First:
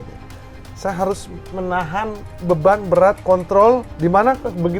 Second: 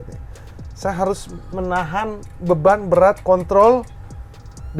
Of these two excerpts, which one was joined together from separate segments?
first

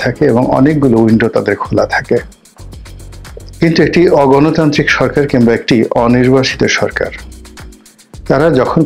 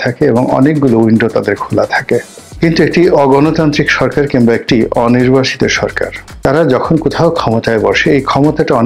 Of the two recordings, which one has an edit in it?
second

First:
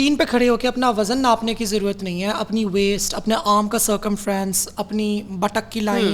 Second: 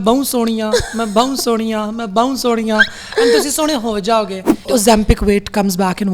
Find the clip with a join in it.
second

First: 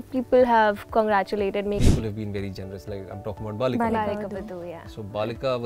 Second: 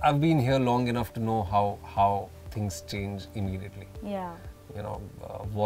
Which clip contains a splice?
first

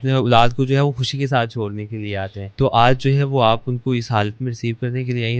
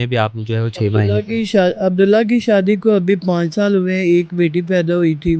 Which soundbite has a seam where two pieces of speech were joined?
first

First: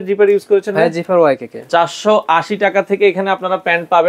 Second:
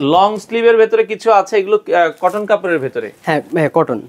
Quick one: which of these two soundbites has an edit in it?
first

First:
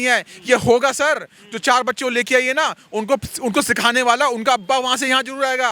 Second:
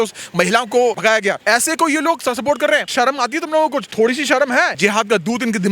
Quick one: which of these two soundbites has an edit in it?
second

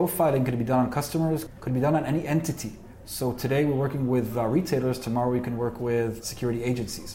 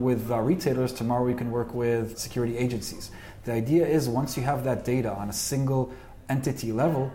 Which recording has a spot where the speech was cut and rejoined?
first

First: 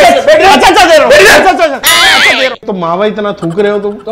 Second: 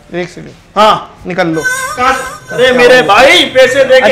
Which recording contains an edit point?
first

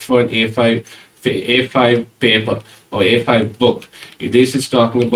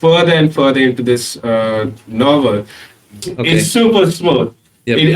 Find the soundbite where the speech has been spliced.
second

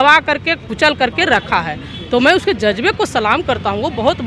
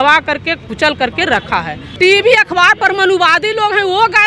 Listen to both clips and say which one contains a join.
second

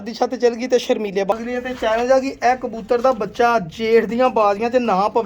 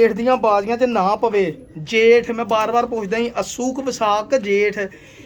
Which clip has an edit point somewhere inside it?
first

